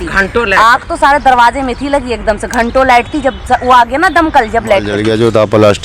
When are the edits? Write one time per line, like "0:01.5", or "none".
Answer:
0:04.9